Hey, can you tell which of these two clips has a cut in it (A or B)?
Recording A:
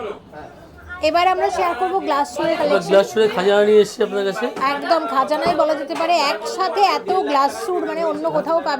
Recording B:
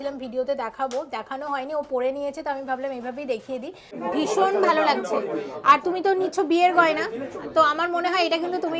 B